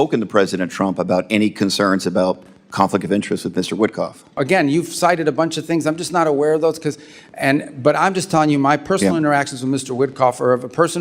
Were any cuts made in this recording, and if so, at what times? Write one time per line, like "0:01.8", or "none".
0:04.4

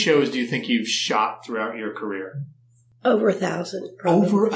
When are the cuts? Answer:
none

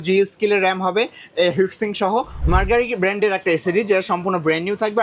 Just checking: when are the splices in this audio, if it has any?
0:02.3

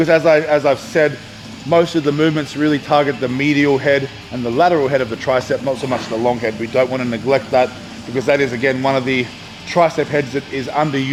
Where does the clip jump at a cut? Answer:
none

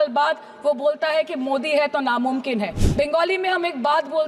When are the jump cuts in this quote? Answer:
0:02.8

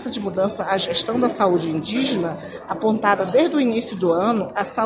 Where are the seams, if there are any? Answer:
none

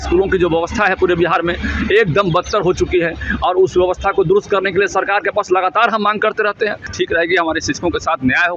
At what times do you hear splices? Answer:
0:06.9

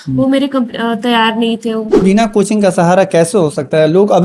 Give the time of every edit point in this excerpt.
0:02.0

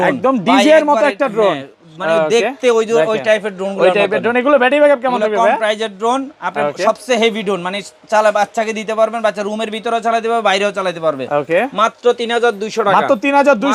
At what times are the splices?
none

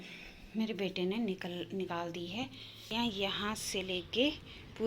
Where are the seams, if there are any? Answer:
0:02.9

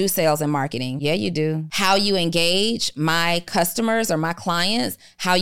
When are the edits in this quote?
0:00.9
0:01.7

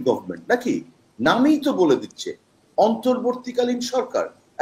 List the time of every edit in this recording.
none

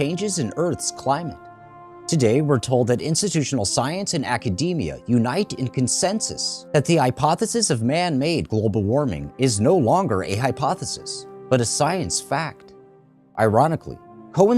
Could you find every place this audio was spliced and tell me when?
0:02.6

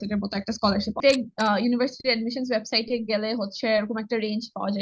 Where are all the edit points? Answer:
0:01.0

